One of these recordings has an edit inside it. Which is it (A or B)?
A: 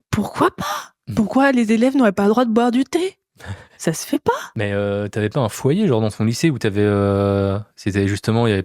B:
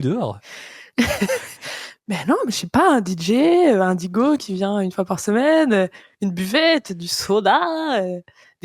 A